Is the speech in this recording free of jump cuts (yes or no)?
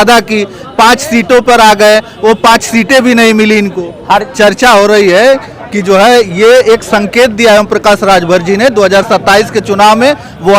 no